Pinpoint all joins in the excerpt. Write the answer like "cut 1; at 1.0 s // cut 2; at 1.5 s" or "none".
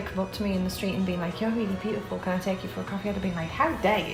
none